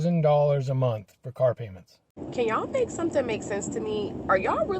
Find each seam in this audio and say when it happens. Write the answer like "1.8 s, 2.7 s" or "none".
2.1 s